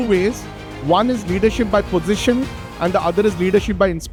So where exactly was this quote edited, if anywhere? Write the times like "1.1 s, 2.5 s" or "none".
none